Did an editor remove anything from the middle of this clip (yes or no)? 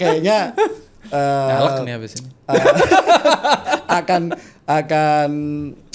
no